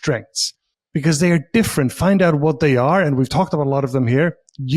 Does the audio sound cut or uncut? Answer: uncut